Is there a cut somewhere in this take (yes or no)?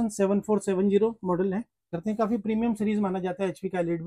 yes